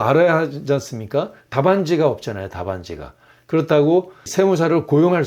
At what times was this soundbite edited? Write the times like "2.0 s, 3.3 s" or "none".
4.3 s